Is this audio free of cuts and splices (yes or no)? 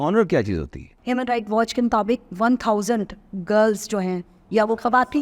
no